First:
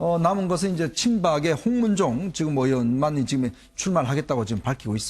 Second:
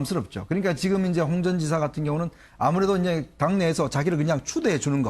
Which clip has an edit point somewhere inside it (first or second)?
first